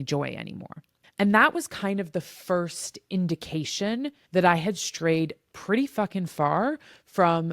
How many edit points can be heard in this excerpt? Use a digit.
1